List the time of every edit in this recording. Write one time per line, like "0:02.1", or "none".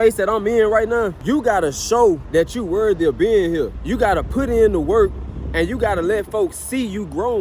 0:01.2
0:02.2
0:03.8

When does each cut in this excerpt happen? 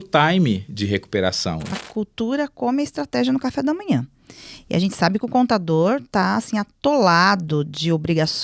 0:01.8

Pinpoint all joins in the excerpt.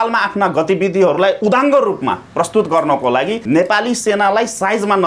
0:01.4
0:03.4

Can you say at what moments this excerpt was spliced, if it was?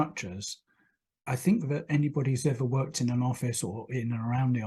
none

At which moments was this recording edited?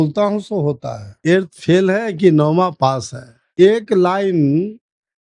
0:01.2
0:03.5

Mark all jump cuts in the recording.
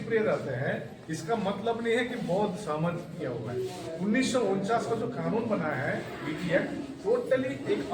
none

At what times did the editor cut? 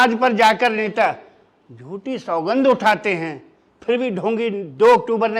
none

